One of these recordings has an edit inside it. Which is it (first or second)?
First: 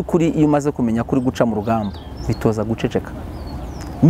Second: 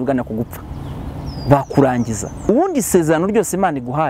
second